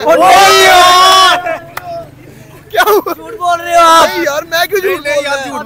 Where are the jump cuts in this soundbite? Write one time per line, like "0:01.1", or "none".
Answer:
none